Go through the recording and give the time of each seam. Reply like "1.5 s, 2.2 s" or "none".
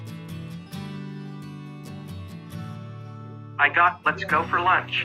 none